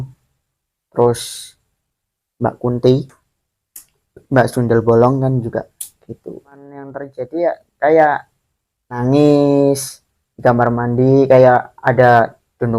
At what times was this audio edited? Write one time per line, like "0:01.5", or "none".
0:07.0
0:09.0